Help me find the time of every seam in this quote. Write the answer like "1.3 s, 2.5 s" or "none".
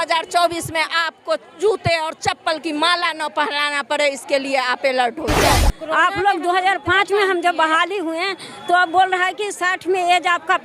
5.5 s

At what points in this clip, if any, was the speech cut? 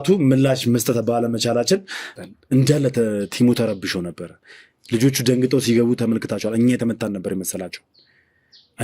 2.1 s

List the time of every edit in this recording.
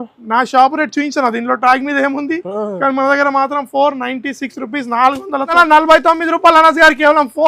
5.5 s

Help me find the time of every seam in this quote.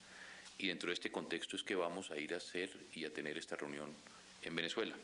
none

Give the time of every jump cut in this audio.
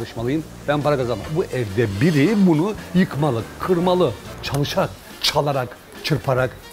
1.3 s, 4.2 s

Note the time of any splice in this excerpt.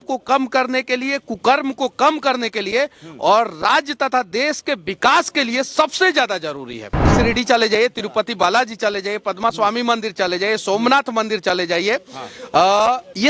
7.0 s

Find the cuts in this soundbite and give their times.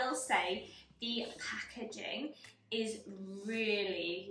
none

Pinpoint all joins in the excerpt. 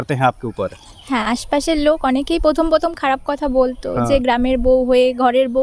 none

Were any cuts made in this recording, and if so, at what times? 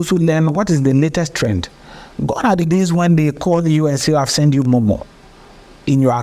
none

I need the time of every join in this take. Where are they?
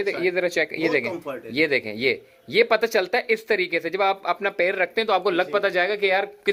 none

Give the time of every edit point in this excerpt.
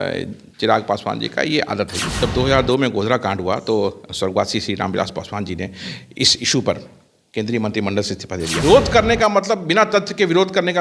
2.0 s, 8.6 s

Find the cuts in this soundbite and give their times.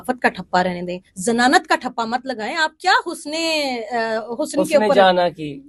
none

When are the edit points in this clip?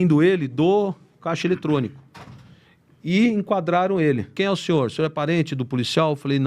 4.3 s

